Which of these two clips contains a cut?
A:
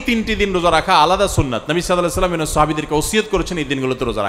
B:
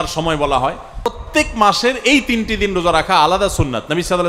B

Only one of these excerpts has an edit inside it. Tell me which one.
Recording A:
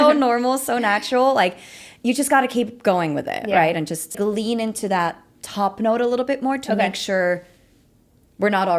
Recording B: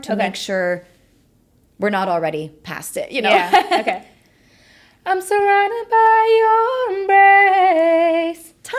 A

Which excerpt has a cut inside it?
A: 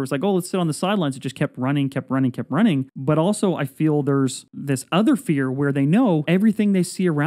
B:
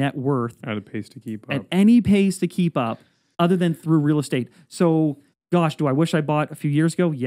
A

